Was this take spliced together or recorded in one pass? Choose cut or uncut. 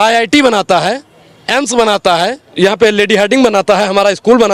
cut